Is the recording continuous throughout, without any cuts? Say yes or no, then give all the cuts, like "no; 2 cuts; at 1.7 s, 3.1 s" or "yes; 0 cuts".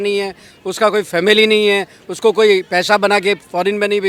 yes; 0 cuts